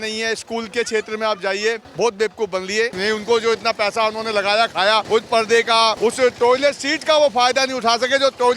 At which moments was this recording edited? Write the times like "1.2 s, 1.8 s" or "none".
1.9 s, 2.9 s, 5.1 s, 6.0 s

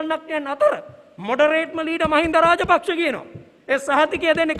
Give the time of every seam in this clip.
none

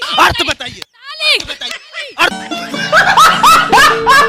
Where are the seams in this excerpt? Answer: 2.4 s

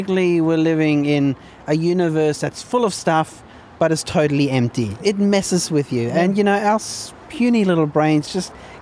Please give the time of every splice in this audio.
5.0 s

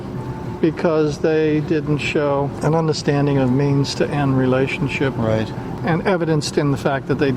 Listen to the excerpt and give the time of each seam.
2.5 s, 5.8 s

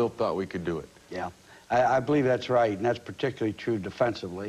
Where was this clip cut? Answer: 2.8 s

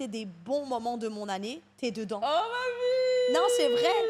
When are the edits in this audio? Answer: none

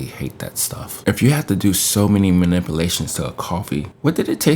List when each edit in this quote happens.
0.9 s

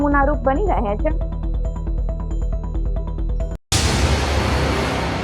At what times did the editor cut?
3.5 s

